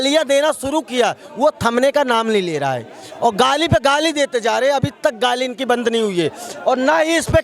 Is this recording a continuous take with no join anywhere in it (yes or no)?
yes